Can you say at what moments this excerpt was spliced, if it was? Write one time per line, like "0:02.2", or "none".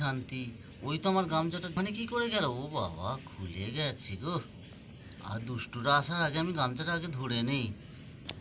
0:01.7

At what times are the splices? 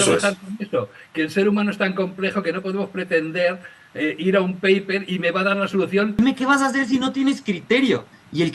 0:06.2

